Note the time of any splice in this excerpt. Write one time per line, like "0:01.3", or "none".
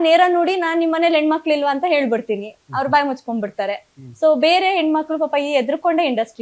none

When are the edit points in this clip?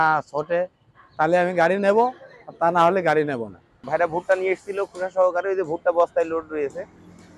0:03.8

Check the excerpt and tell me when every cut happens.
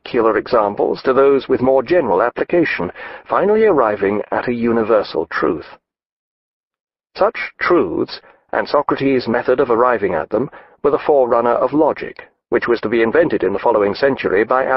0:11.4

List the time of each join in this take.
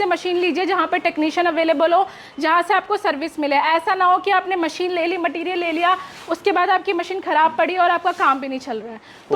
none

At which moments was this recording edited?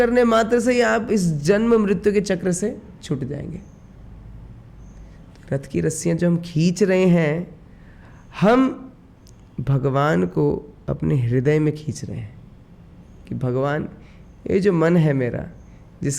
none

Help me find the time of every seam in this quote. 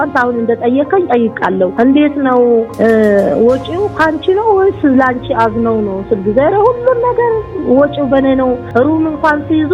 0:01.7
0:02.7
0:08.6

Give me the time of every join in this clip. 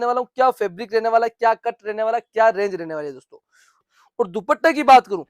0:03.6

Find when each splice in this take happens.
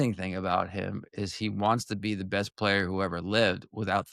none

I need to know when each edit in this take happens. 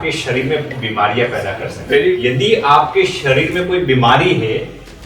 0:02.2

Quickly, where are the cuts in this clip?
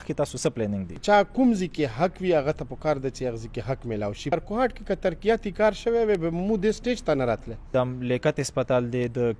0:01.0
0:04.3
0:07.7

